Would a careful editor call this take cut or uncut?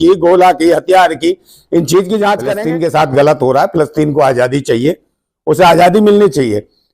cut